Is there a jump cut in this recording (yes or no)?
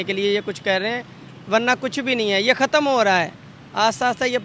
no